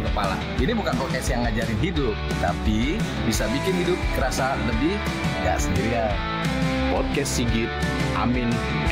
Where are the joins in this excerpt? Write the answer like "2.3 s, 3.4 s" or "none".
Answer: none